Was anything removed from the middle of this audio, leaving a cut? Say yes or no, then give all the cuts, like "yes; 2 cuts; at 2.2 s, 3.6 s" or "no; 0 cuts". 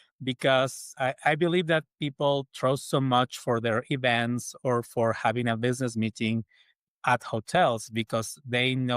yes; 1 cut; at 0.9 s